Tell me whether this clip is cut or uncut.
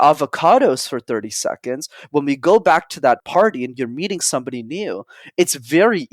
cut